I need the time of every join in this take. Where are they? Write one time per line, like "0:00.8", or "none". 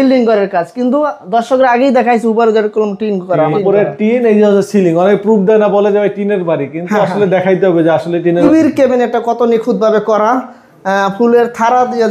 0:03.6
0:08.4